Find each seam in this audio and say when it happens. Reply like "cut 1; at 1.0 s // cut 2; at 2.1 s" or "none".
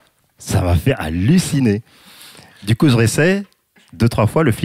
none

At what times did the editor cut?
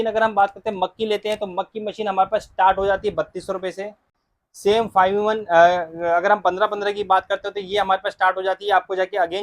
none

